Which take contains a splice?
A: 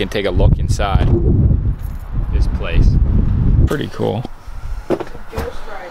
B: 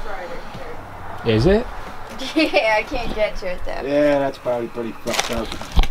A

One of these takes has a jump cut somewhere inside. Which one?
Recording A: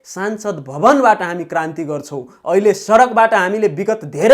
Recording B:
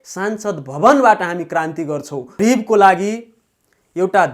B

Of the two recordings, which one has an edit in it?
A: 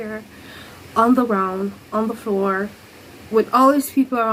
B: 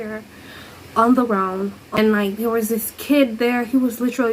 B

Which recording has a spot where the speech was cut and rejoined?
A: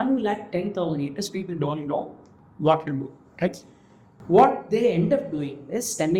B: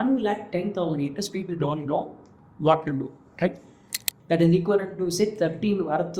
B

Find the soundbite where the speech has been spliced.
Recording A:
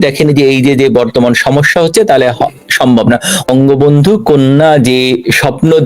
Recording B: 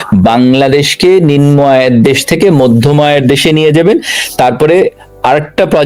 A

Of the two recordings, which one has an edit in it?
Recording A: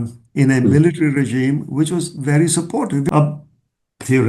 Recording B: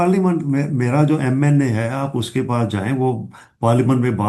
A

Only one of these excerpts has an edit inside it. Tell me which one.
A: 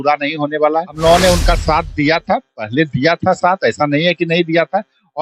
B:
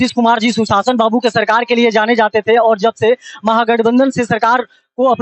A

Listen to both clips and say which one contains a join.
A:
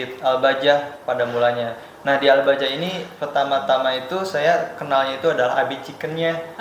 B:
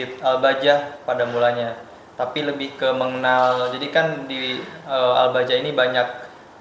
A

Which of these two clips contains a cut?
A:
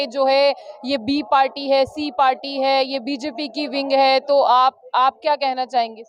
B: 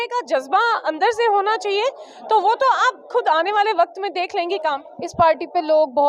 B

